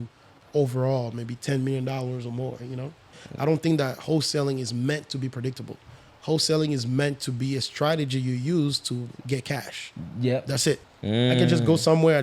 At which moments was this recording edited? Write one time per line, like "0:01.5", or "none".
0:03.2
0:10.9